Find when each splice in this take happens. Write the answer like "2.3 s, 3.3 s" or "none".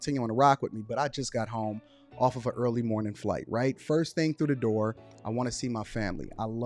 1.2 s